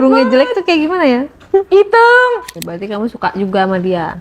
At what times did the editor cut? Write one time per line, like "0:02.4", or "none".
0:02.5